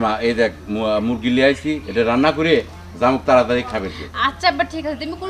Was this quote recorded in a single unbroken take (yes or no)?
yes